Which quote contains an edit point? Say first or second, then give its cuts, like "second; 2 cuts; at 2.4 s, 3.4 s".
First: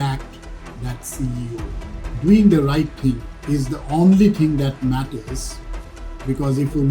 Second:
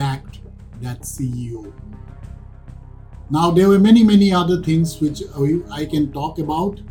first; 2 cuts; at 2.1 s, 3.3 s